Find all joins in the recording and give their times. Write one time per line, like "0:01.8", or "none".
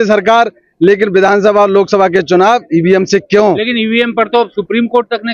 none